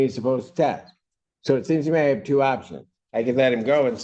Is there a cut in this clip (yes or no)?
no